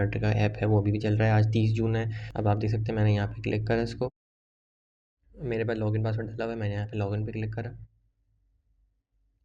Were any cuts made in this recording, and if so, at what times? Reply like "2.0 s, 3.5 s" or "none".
2.2 s

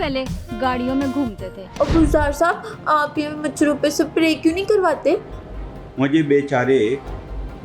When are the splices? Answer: 1.6 s

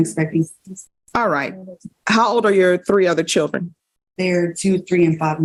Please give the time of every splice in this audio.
none

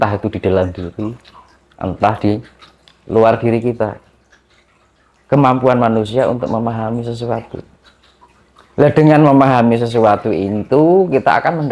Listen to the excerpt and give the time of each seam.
none

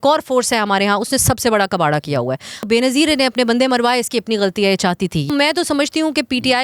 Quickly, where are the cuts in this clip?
2.6 s, 5.3 s

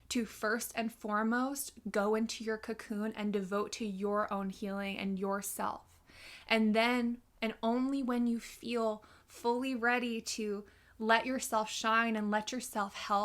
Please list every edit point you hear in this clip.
none

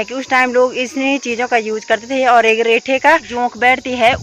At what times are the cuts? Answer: 3.3 s

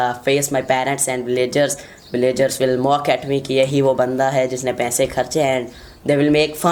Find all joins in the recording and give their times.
none

